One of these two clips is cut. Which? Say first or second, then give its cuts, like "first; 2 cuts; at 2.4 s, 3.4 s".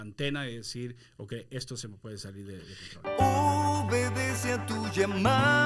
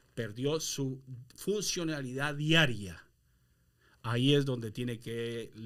first; 1 cut; at 3.0 s